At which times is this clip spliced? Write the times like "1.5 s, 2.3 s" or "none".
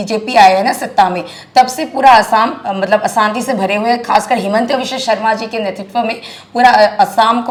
none